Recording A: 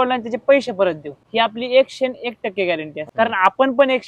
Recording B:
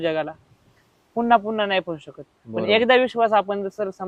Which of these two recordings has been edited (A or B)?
A